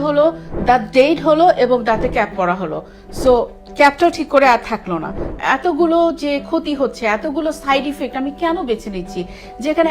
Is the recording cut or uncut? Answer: cut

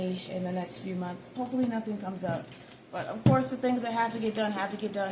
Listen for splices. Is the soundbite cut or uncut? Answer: uncut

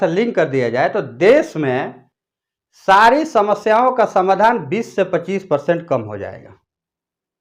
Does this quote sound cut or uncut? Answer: uncut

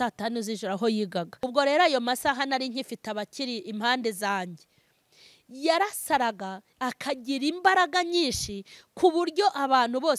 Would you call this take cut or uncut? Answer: cut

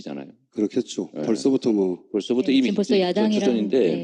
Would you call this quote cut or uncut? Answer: cut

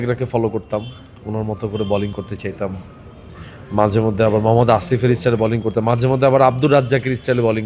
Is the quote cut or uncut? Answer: uncut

